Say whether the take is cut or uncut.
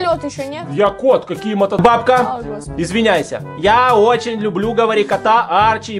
cut